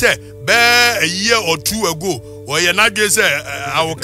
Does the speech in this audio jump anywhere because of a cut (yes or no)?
no